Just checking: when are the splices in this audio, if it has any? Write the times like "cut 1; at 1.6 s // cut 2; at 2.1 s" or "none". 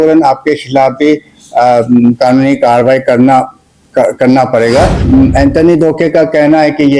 cut 1; at 5.0 s